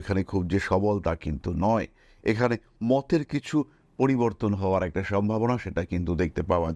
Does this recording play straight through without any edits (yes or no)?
yes